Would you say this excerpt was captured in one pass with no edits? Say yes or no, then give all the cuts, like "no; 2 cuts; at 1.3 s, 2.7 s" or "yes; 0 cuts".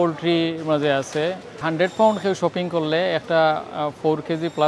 no; 1 cut; at 1.6 s